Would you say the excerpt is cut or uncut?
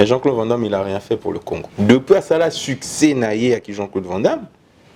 cut